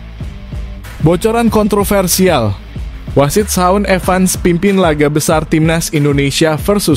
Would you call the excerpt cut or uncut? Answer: cut